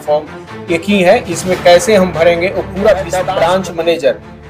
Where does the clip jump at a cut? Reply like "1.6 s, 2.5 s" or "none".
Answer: 3.3 s